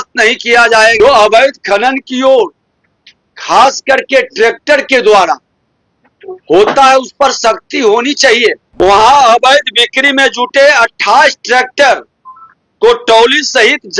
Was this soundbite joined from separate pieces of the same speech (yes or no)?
yes